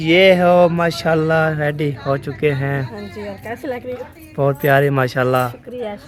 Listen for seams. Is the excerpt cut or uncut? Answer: uncut